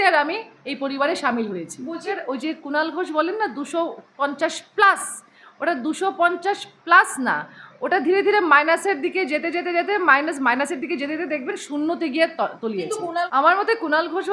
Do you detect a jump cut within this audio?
yes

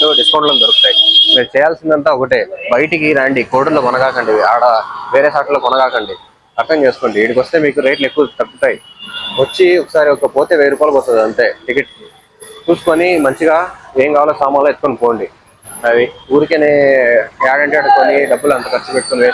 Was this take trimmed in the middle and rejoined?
no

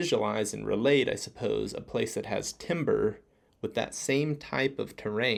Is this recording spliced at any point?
no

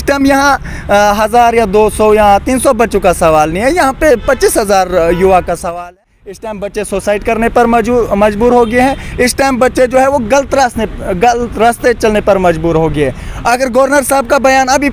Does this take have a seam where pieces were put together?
yes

